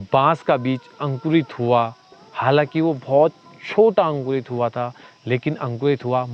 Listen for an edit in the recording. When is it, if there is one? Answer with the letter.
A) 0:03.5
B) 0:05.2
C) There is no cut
C